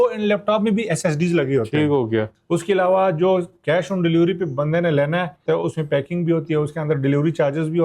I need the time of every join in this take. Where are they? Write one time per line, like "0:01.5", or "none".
0:02.3
0:05.4